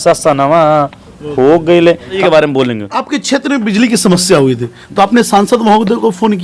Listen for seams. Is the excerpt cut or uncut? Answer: cut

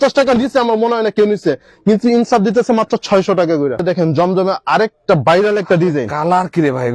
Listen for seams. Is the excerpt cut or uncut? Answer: cut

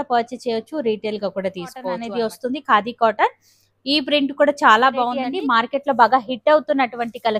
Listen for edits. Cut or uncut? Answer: cut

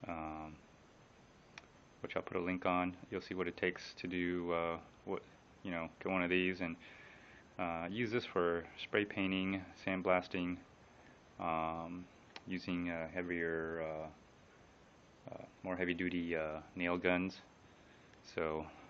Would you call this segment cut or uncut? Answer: cut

